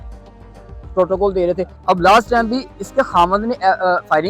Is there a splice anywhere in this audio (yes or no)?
yes